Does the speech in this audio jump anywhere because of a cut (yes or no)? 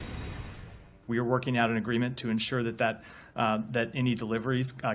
yes